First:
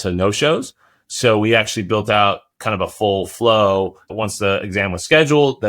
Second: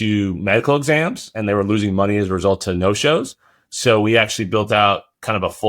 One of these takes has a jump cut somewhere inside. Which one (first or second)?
first